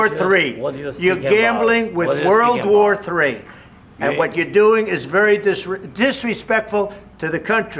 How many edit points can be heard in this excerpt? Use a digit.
0